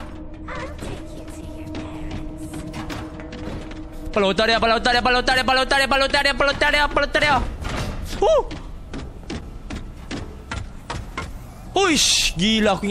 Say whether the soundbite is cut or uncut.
uncut